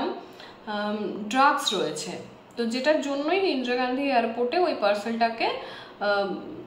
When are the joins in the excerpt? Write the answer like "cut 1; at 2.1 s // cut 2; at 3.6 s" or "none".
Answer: none